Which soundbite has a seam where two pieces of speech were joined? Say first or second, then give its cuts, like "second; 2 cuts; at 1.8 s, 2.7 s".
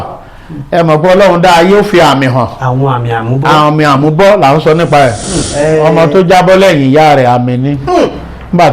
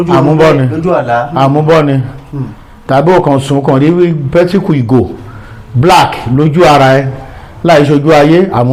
first; 1 cut; at 5.9 s